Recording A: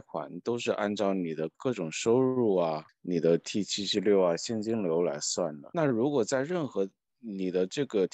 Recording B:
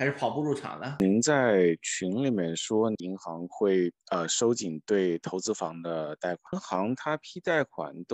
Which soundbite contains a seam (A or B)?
B